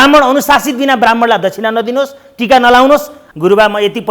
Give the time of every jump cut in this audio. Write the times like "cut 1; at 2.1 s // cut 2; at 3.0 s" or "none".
cut 1; at 3.2 s